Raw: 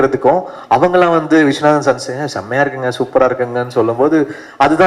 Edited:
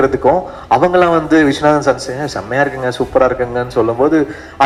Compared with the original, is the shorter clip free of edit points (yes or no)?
yes